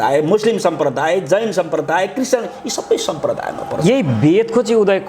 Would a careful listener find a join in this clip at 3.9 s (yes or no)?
no